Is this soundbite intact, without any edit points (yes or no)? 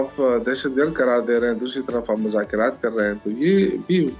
yes